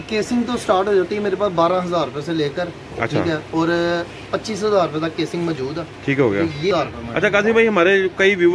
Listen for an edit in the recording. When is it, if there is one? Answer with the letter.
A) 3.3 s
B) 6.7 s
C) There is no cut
B